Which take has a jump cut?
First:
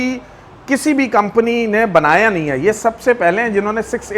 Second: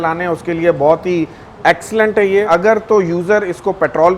second; 1 cut; at 2.5 s

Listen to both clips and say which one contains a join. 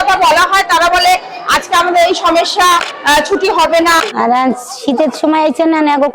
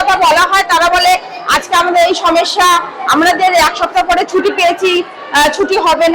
first; 2 cuts; at 2.9 s, 4.0 s

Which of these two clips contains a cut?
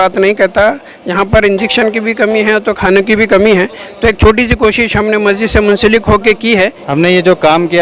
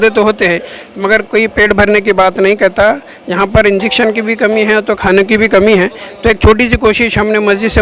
first; 1 cut; at 6.8 s

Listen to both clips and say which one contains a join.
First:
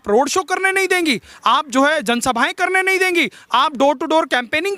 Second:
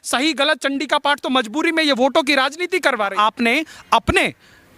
second; 1 cut; at 3.1 s

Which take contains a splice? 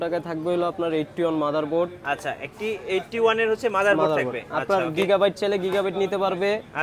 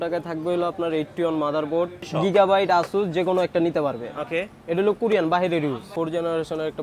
second; 2 cuts; at 2.0 s, 5.9 s

